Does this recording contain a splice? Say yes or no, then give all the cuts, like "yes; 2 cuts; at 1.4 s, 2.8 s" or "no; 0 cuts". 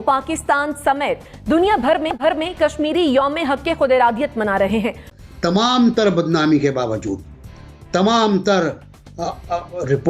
yes; 1 cut; at 5.1 s